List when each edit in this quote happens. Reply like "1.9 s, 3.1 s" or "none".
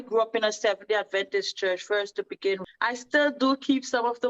2.6 s